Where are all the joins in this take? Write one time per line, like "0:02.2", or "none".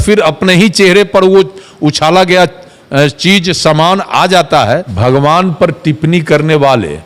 0:04.9